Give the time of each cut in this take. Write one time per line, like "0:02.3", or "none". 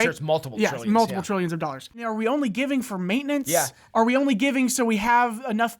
0:02.1